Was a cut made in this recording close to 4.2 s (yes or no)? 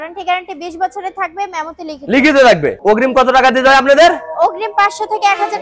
no